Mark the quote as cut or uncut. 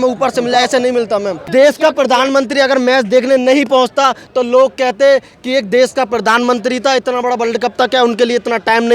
cut